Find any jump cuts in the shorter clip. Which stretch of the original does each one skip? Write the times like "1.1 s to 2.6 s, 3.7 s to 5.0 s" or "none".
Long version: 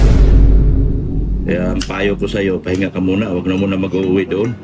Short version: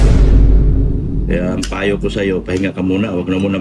1.2 s to 1.4 s